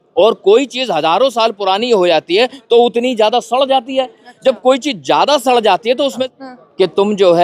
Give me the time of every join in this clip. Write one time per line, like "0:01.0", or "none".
0:06.2